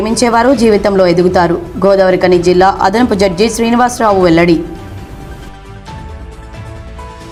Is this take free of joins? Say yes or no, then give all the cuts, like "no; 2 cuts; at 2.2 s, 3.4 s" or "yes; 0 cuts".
yes; 0 cuts